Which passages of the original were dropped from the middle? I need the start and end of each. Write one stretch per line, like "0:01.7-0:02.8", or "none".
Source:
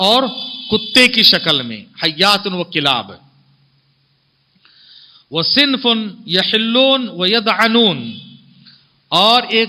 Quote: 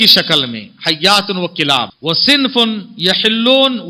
0:03.1-0:05.2